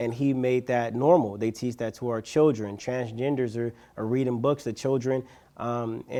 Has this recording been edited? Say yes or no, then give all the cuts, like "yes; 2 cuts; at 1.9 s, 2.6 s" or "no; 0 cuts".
no; 0 cuts